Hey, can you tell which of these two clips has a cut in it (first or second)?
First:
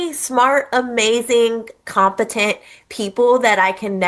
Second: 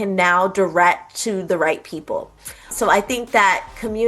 second